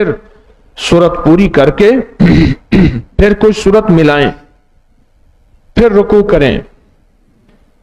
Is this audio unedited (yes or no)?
yes